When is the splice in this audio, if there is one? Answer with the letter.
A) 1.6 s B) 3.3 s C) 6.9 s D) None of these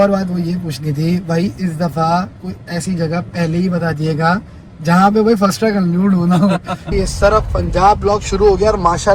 C